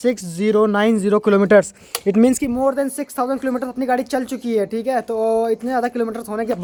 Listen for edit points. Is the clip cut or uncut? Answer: uncut